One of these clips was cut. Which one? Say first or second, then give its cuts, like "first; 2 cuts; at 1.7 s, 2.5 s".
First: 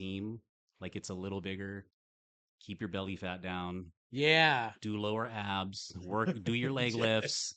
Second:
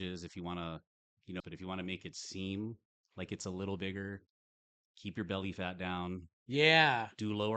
second; 1 cut; at 1.4 s